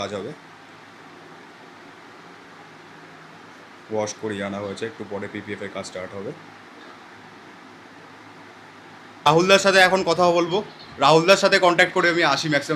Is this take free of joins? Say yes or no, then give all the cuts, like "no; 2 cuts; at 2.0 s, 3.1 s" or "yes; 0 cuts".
yes; 0 cuts